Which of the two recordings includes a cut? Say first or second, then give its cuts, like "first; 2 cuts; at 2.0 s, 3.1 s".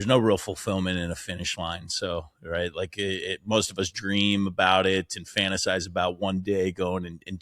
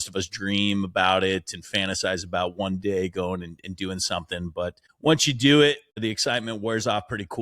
second; 2 cuts; at 4.9 s, 6.0 s